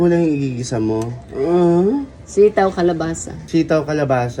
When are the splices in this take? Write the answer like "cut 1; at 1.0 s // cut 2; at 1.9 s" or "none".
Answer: cut 1; at 3.3 s